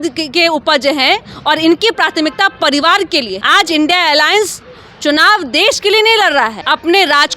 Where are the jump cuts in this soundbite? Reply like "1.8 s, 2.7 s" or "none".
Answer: 3.4 s, 6.6 s